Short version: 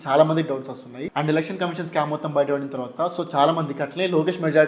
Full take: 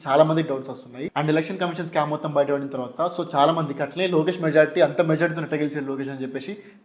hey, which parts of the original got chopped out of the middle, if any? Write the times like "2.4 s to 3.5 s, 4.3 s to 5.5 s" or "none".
none